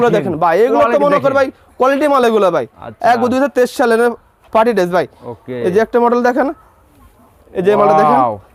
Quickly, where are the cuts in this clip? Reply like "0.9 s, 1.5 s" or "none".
none